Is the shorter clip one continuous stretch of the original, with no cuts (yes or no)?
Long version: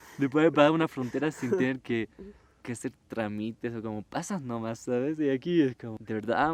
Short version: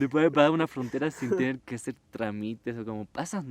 no